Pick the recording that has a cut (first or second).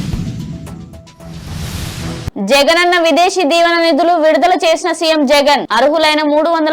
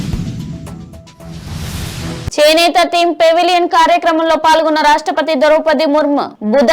second